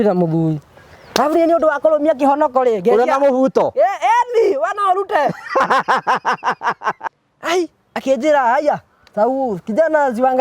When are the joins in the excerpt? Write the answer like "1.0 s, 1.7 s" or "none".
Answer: 7.0 s